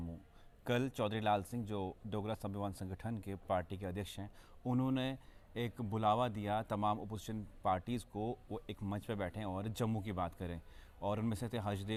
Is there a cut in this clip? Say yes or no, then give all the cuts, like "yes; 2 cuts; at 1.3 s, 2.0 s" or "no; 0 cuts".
no; 0 cuts